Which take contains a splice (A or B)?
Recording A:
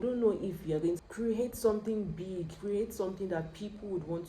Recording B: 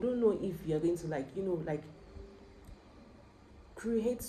A